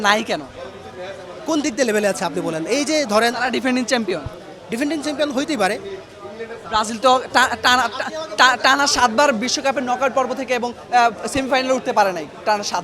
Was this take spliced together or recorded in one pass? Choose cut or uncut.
uncut